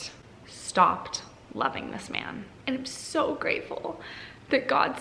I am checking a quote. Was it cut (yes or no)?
yes